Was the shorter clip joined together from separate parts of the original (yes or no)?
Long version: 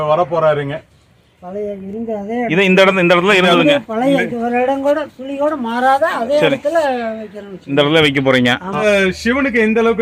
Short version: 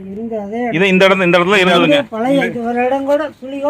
no